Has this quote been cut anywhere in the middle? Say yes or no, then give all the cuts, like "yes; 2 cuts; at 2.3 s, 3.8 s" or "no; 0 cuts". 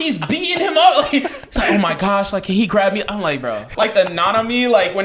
yes; 1 cut; at 3.6 s